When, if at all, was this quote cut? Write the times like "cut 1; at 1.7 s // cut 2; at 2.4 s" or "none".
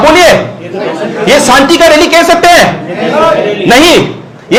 none